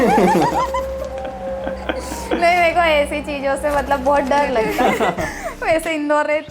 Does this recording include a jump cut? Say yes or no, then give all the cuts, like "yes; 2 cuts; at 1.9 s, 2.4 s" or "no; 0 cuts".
yes; 1 cut; at 4.7 s